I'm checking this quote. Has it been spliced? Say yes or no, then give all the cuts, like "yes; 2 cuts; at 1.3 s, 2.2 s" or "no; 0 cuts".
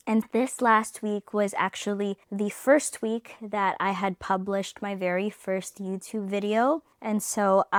no; 0 cuts